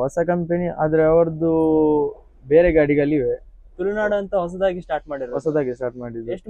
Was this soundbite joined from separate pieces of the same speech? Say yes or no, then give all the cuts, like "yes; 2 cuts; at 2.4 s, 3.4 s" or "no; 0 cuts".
no; 0 cuts